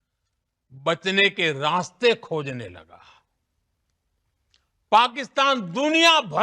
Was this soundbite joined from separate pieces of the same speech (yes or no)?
no